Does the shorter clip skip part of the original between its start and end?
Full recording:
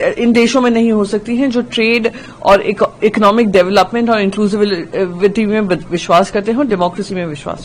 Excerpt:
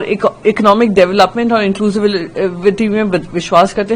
no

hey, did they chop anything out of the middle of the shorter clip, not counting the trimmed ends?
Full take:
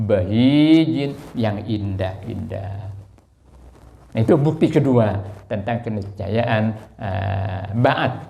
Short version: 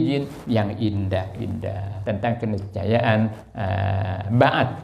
yes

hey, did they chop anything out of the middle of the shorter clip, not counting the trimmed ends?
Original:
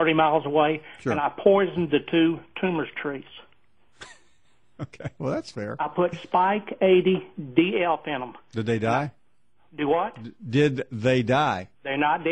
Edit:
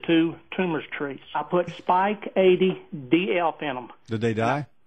yes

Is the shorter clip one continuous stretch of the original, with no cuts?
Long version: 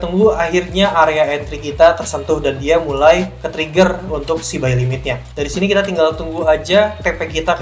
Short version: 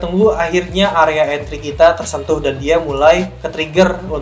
yes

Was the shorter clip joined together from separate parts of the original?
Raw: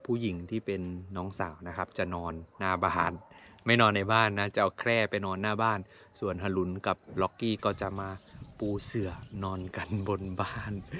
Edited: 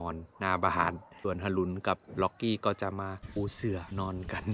yes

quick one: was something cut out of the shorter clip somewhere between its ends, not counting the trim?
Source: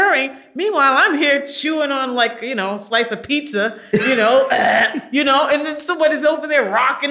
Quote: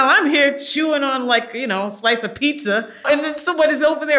yes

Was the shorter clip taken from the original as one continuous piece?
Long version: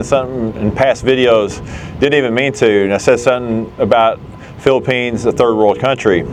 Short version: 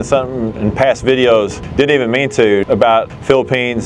no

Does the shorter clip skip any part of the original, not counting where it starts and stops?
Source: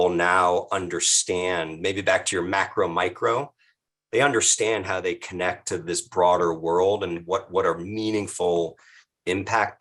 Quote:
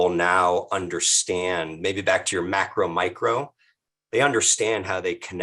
no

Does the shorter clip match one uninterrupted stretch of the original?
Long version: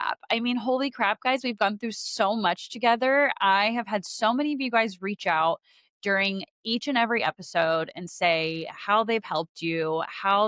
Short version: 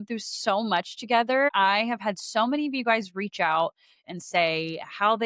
no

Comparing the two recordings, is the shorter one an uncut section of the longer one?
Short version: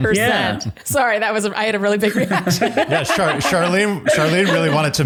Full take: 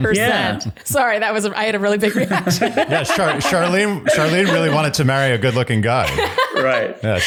yes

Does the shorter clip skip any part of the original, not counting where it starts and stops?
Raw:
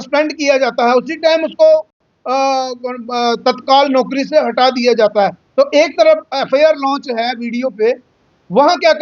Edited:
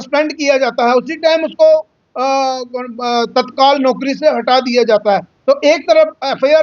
yes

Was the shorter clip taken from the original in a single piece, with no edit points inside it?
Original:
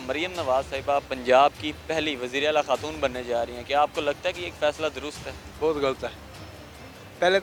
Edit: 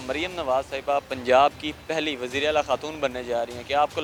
yes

